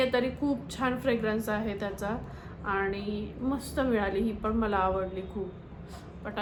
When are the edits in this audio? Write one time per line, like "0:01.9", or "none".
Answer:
none